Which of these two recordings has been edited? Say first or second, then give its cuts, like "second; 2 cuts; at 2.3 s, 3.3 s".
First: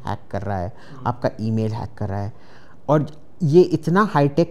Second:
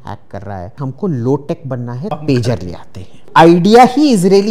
second; 3 cuts; at 0.8 s, 2.1 s, 3.3 s